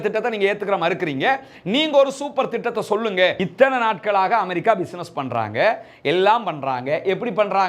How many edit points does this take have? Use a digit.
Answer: 1